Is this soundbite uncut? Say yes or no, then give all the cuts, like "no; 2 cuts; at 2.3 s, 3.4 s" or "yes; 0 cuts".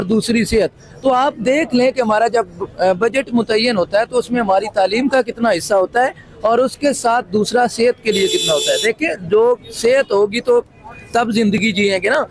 yes; 0 cuts